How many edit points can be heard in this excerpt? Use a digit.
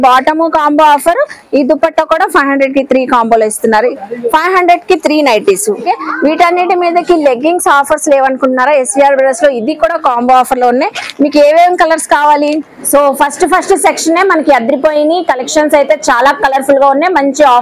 3